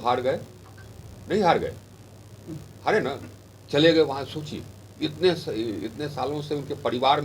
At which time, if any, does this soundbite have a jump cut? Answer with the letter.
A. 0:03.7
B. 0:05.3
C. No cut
C